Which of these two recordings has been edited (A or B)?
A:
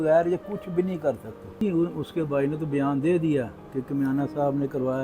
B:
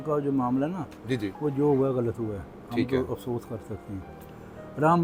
A